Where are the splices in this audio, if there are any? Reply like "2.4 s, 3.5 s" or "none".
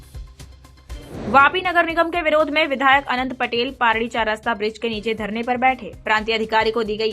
none

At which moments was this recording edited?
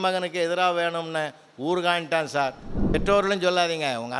2.7 s

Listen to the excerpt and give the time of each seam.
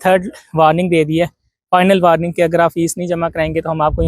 none

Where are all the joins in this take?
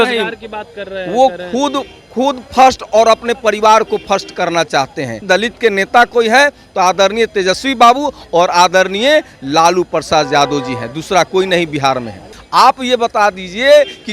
5.2 s, 12.4 s

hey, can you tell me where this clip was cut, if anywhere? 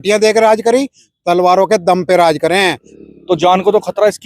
2.9 s

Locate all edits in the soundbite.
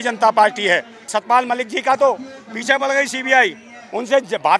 1.2 s

